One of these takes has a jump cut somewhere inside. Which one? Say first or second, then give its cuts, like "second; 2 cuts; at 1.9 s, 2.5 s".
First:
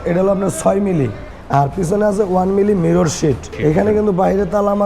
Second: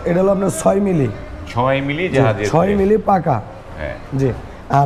first; 2 cuts; at 1.3 s, 3.5 s